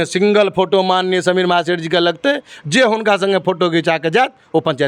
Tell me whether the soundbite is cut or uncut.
uncut